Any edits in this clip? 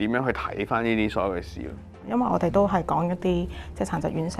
yes; 1 cut; at 2.0 s

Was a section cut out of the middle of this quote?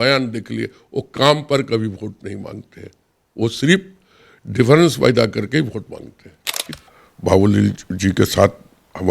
yes; 1 cut; at 6.5 s

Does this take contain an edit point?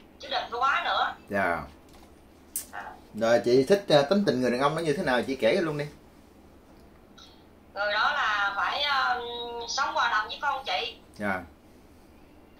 no; 0 cuts

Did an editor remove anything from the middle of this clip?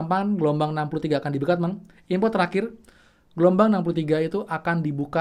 no; 0 cuts

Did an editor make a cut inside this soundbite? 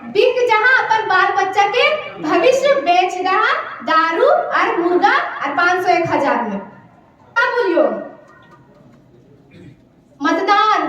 yes; 1 cut; at 7.4 s

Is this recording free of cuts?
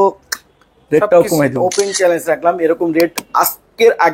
no; 1 cut; at 1.6 s

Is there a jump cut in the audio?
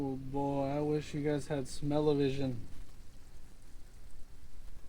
no; 0 cuts

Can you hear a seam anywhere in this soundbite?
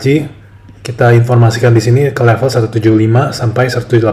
no; 0 cuts

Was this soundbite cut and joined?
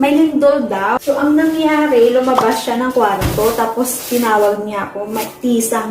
yes; 1 cut; at 1.0 s

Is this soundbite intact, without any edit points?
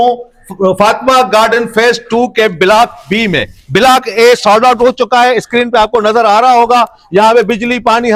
yes; 0 cuts

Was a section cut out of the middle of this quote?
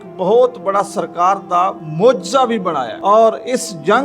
yes; 2 cuts; at 1.8 s, 2.9 s

